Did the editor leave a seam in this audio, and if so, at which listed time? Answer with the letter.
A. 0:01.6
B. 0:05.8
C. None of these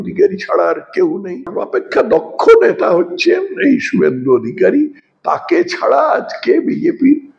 A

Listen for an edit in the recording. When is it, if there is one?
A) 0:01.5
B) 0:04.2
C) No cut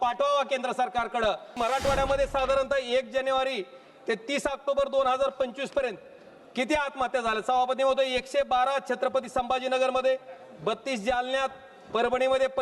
A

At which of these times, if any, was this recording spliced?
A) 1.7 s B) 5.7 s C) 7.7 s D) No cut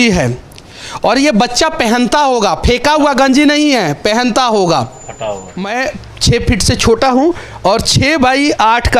B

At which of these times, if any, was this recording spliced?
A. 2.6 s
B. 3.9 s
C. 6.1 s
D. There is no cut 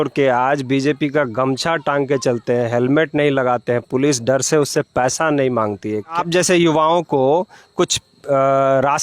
C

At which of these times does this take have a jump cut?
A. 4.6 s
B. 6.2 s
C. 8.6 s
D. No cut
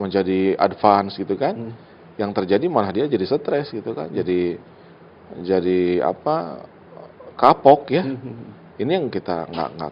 D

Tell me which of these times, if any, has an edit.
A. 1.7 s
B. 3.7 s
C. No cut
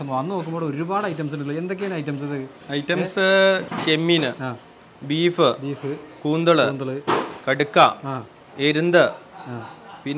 B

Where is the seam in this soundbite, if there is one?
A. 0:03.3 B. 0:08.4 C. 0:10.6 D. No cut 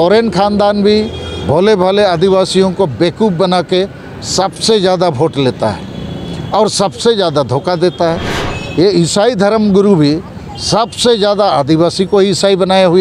B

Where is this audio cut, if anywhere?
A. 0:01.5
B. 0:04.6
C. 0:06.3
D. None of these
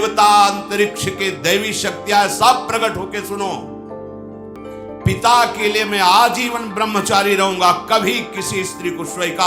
B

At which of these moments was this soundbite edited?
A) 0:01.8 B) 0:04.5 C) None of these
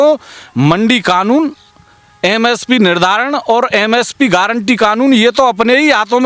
C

